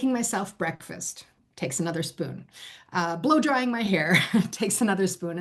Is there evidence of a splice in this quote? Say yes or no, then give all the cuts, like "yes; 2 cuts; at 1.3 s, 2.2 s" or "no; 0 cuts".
no; 0 cuts